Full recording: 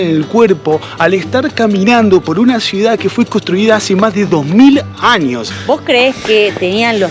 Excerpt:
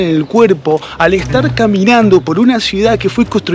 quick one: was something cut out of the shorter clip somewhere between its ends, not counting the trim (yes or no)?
no